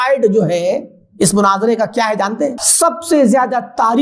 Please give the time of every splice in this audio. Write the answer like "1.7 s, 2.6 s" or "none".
2.7 s